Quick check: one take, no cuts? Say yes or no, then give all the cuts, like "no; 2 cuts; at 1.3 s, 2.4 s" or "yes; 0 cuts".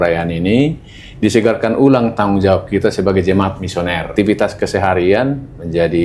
no; 1 cut; at 4.1 s